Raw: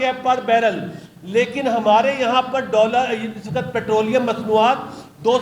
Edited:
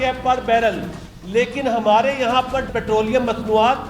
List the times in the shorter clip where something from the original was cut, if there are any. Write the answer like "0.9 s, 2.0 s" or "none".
2.7 s